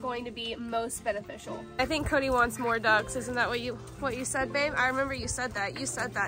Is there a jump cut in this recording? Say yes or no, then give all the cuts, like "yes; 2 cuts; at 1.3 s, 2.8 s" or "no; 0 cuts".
yes; 1 cut; at 1.8 s